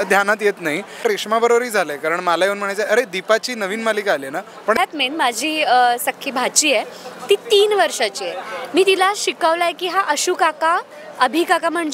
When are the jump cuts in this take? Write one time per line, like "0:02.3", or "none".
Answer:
0:01.0
0:04.8